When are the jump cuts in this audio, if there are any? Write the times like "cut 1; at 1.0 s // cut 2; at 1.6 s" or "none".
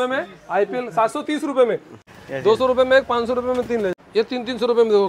cut 1; at 2.0 s // cut 2; at 3.9 s